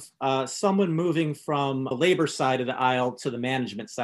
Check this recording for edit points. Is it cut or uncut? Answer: cut